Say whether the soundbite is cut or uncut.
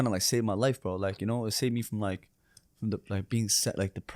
uncut